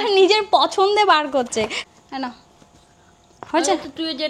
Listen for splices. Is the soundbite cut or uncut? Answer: cut